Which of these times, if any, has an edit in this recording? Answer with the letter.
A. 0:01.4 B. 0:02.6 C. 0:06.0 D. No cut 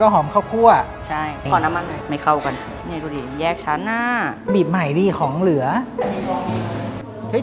A